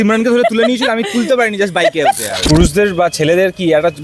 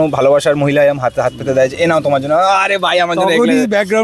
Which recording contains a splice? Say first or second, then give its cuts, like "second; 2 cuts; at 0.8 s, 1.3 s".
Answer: first; 1 cut; at 2.3 s